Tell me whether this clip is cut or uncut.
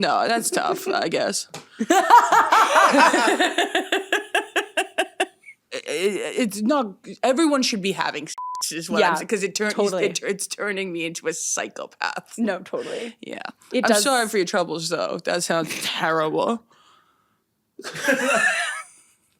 cut